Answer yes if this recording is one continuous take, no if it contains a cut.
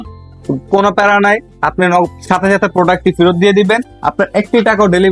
yes